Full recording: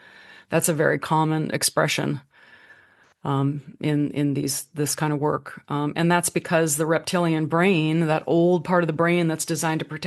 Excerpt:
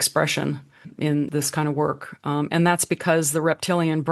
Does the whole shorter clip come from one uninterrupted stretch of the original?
no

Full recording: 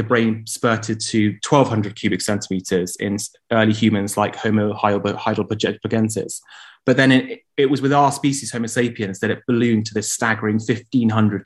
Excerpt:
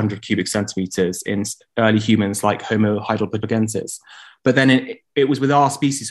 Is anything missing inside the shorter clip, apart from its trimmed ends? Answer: yes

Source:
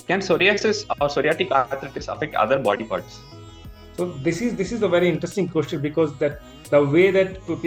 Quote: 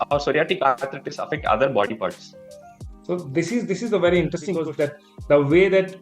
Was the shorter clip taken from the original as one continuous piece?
no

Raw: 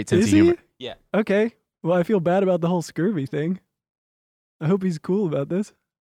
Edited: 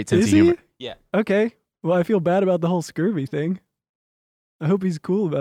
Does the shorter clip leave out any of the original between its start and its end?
no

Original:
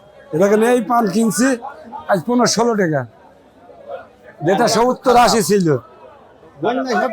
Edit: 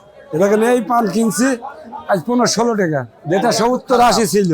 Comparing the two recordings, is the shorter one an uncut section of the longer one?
no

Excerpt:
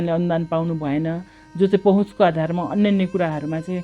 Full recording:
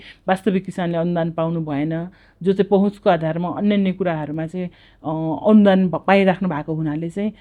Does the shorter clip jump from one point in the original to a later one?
no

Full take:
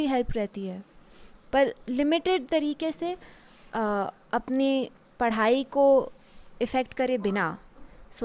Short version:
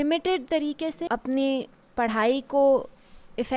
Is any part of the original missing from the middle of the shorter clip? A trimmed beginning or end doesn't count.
yes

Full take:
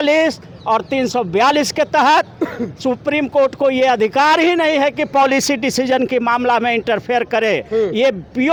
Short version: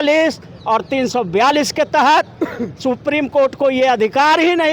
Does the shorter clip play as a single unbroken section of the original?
yes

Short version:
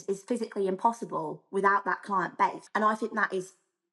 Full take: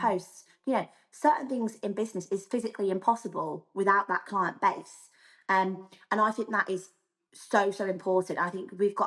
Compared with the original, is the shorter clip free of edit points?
no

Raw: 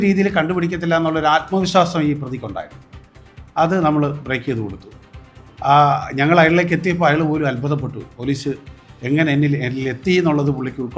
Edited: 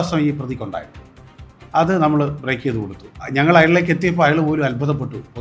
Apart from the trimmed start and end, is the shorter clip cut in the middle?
yes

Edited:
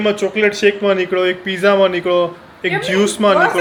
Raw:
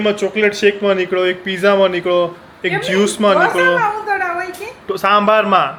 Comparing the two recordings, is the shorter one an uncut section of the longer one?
yes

